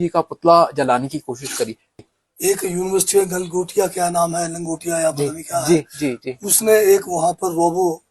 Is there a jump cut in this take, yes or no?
yes